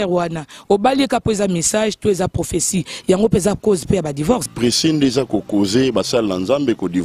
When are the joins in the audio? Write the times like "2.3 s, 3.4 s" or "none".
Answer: 4.5 s